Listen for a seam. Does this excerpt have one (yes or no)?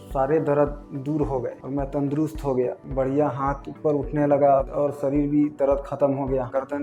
no